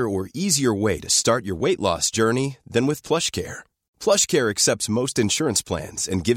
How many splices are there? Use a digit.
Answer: 0